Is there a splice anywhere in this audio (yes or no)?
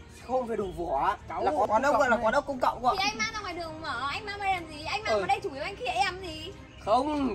yes